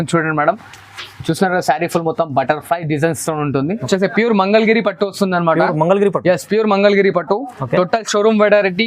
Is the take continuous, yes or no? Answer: no